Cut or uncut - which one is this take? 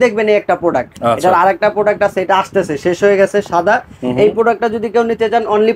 uncut